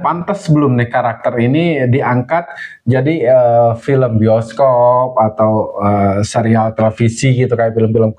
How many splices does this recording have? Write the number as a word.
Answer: zero